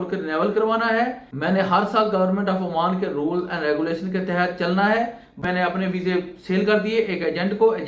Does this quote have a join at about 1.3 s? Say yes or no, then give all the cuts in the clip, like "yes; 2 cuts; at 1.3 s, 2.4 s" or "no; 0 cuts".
yes; 2 cuts; at 1.3 s, 5.4 s